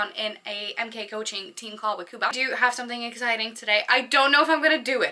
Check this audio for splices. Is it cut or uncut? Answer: cut